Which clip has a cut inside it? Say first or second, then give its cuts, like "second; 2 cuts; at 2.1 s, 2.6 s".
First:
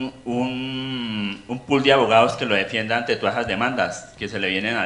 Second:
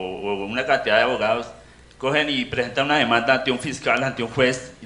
second; 1 cut; at 1.5 s